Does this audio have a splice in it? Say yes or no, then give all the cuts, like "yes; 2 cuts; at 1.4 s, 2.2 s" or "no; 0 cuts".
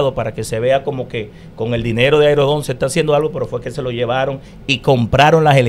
no; 0 cuts